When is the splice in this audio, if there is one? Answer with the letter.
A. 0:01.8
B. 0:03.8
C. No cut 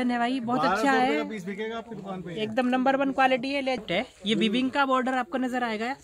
B